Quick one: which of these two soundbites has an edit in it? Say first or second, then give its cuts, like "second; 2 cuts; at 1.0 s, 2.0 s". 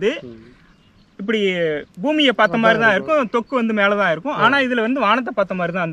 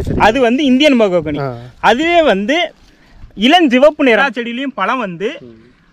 second; 1 cut; at 4.2 s